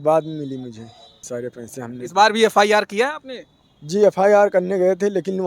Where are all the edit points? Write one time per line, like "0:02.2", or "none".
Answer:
0:01.2